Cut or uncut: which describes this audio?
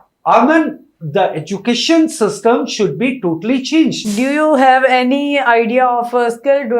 cut